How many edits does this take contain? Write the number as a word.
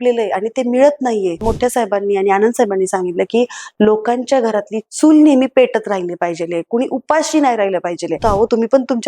two